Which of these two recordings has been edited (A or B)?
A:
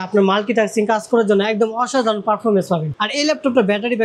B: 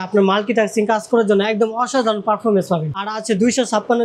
A